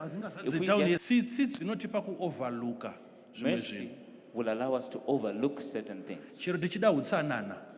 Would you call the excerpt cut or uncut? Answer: uncut